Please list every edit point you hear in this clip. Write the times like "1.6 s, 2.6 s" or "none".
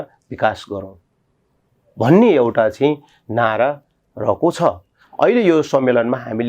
5.0 s